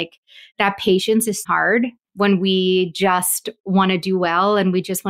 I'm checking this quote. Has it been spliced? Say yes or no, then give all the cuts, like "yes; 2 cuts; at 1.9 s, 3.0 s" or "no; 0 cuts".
yes; 1 cut; at 1.6 s